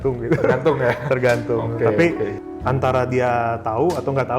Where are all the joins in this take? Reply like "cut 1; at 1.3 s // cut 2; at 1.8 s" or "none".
cut 1; at 2.5 s